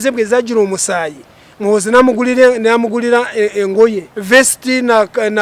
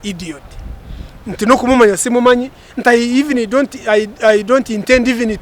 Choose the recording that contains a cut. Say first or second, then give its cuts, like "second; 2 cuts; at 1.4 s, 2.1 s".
first; 1 cut; at 4.1 s